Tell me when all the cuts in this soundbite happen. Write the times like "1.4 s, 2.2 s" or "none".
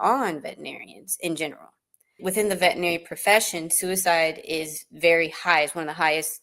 2.2 s